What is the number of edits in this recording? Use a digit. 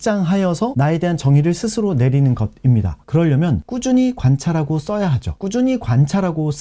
1